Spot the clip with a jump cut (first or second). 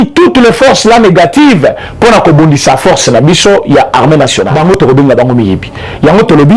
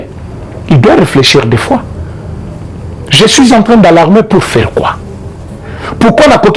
first